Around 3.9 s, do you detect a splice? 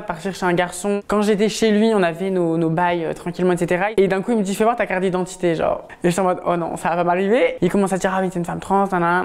yes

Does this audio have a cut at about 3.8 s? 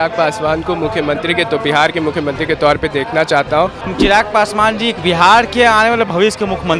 yes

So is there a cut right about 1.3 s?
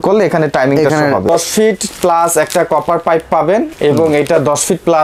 yes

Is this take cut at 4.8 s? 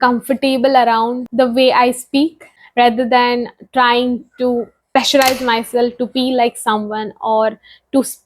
yes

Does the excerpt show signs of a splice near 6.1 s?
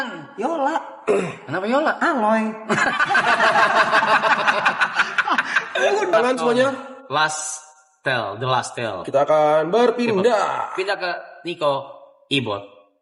yes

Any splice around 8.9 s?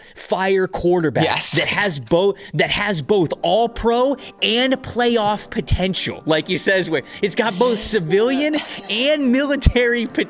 yes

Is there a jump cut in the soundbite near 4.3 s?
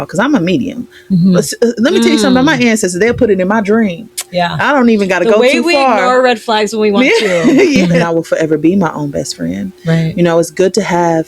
no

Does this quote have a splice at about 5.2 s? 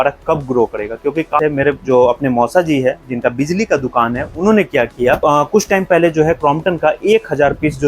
yes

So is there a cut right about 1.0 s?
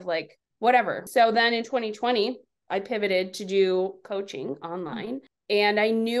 yes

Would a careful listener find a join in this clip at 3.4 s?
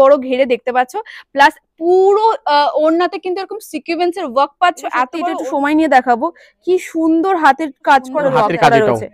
no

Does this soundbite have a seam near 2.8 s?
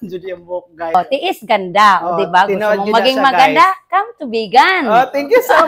no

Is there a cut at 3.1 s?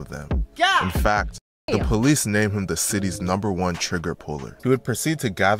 no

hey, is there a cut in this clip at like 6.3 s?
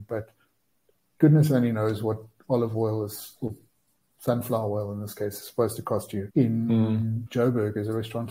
yes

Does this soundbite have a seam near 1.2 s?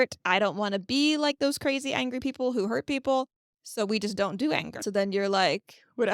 no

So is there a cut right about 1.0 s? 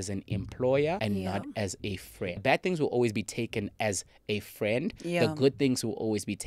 yes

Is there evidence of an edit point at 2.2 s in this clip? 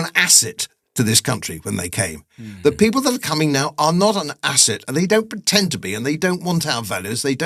no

